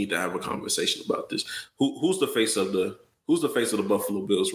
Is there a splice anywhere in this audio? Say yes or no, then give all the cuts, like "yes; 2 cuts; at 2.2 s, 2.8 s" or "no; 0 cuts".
no; 0 cuts